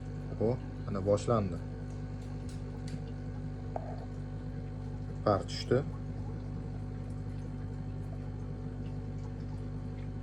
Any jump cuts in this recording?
no; 0 cuts

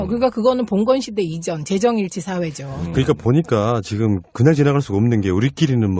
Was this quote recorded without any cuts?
no; 1 cut; at 4.2 s

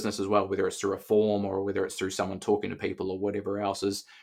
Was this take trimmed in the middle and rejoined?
no; 0 cuts

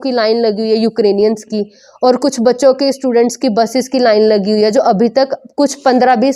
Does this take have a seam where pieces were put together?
no; 0 cuts

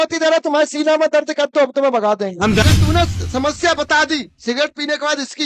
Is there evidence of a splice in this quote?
yes; 1 cut; at 2.6 s

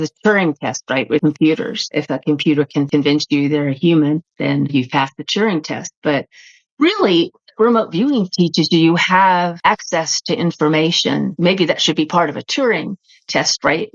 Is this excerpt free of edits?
no; 5 cuts; at 1.2 s, 1.8 s, 2.9 s, 9.6 s, 11.3 s

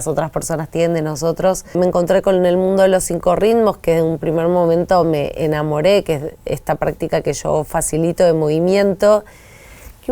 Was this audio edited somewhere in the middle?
yes; 1 cut; at 1.7 s

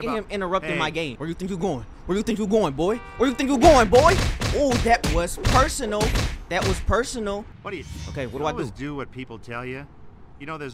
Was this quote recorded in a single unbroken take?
no; 2 cuts; at 1.2 s, 7.6 s

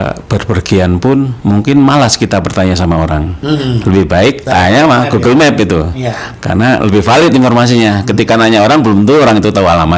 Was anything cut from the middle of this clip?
yes; 3 cuts; at 1.3 s, 3.3 s, 4.4 s

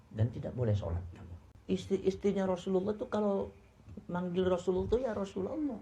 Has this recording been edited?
yes; 1 cut; at 1.5 s

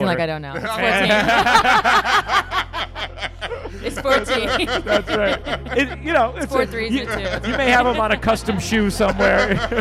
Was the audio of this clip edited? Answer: no; 0 cuts

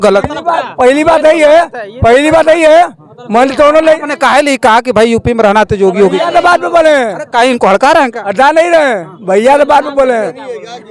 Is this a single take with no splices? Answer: yes; 0 cuts

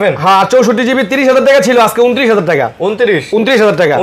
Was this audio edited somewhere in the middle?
no; 0 cuts

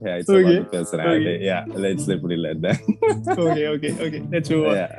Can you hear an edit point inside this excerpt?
no; 0 cuts

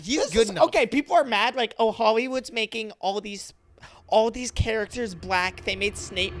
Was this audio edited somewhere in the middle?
no; 0 cuts

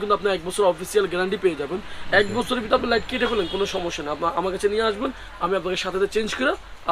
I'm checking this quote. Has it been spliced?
no; 0 cuts

